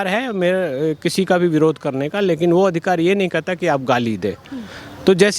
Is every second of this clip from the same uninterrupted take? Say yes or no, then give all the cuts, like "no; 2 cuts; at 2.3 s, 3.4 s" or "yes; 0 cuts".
yes; 0 cuts